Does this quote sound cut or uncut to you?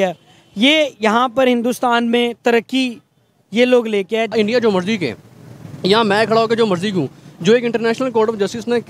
cut